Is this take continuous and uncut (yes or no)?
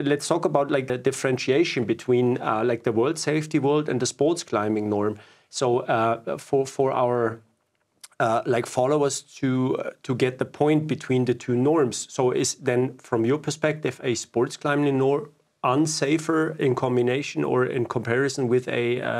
no